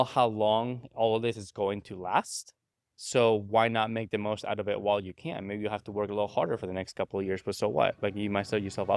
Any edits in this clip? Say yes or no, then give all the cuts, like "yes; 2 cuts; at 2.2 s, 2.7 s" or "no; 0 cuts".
no; 0 cuts